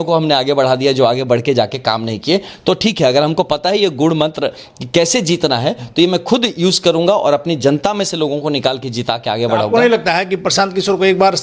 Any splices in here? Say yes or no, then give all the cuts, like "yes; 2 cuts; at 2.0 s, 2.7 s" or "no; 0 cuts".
no; 0 cuts